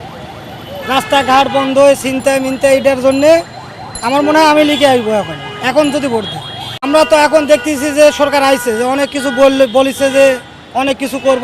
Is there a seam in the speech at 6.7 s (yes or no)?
yes